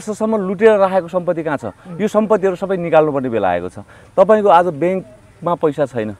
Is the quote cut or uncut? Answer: uncut